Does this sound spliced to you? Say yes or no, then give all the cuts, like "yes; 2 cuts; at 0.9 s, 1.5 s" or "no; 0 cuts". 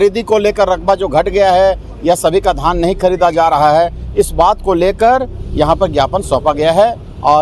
no; 0 cuts